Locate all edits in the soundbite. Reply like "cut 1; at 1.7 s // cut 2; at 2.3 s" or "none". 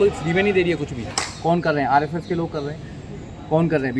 cut 1; at 1.1 s